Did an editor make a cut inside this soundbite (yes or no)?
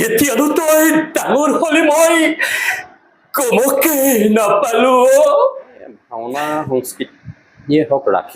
yes